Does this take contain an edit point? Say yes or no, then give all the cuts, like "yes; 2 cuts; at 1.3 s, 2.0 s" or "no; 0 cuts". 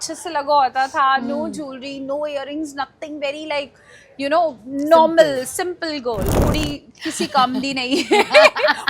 yes; 1 cut; at 6.4 s